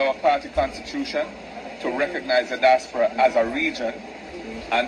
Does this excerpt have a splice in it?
no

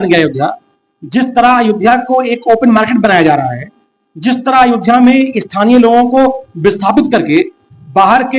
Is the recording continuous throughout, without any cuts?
yes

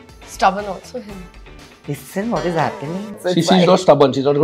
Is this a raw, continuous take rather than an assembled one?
no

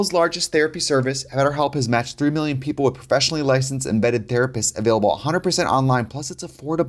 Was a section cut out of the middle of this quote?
no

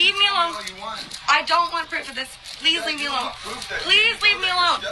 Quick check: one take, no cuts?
no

